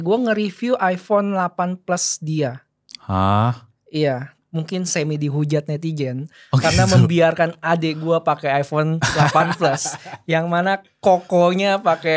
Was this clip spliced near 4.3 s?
yes; 1 cut; at 4.3 s

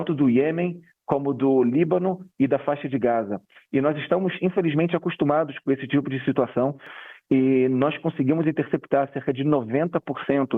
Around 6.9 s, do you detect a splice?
yes; 1 cut; at 6.9 s

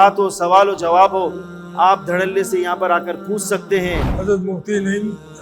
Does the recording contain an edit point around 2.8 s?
no; 1 cut; at 4.1 s

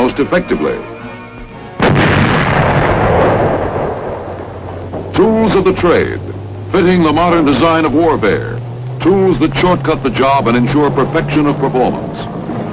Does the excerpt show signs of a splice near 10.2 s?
no; 0 cuts

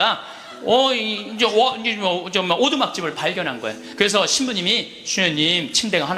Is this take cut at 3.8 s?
yes; 1 cut; at 3.8 s

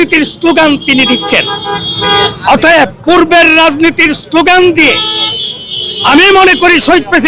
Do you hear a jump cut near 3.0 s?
yes; 1 cut; at 3.0 s

